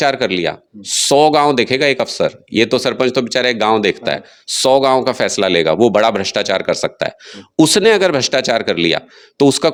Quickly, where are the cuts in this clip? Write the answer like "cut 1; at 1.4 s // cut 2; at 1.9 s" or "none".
none